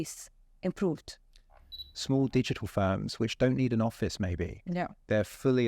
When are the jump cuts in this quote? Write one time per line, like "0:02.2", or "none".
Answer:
0:01.9